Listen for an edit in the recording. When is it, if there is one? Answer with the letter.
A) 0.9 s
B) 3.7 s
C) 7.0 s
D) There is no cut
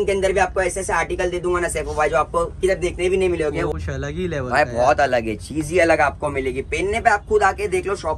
B